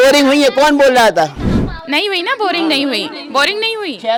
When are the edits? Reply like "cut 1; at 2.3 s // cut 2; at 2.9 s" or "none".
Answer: none